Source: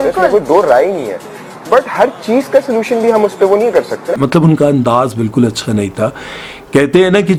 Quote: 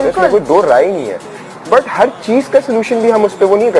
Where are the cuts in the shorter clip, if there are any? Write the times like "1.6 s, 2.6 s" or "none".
none